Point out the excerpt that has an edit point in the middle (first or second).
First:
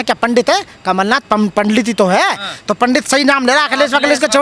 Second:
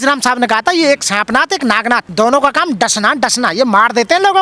second